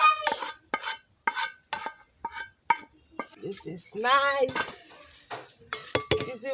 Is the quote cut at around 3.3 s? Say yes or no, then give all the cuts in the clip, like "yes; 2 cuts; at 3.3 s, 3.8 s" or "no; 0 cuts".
yes; 1 cut; at 3.3 s